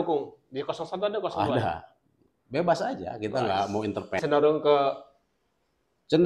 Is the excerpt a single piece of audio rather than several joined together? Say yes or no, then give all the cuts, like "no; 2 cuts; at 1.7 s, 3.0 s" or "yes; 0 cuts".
no; 1 cut; at 4.2 s